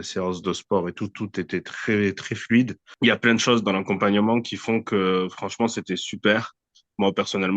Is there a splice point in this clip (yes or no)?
yes